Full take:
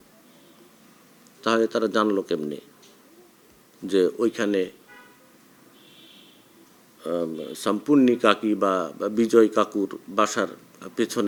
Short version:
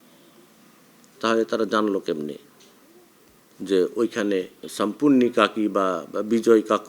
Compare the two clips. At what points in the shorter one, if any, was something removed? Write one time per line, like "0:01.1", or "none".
0:04.6